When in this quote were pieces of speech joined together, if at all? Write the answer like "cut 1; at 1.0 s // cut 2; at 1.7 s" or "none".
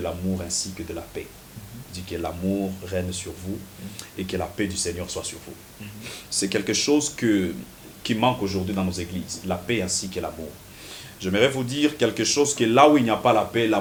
none